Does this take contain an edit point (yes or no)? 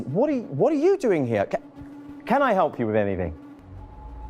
yes